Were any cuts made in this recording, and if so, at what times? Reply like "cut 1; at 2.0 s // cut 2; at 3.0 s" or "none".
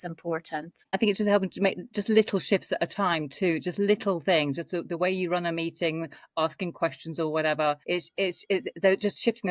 cut 1; at 0.9 s // cut 2; at 7.8 s